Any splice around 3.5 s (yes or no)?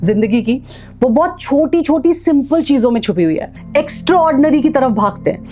yes